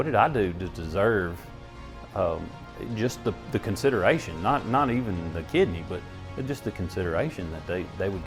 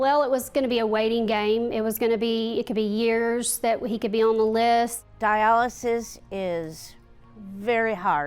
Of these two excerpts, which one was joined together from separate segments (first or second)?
second